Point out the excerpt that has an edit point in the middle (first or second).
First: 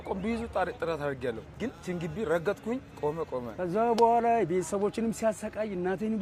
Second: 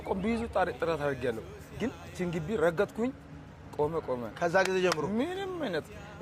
first